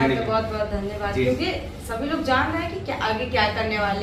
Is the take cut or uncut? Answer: uncut